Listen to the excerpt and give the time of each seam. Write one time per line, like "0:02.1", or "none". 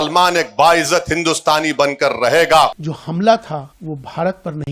0:02.9
0:03.7